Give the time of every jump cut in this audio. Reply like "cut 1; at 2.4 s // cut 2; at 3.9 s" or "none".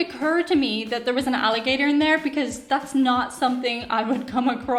none